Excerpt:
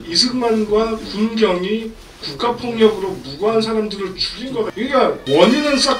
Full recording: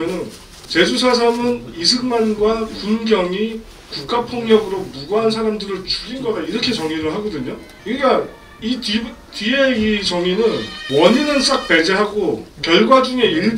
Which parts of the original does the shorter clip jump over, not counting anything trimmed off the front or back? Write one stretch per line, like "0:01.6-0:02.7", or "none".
0:06.7-0:10.6